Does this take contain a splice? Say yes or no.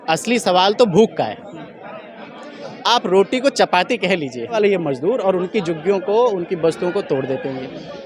yes